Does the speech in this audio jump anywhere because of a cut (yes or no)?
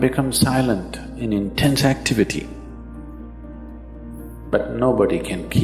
yes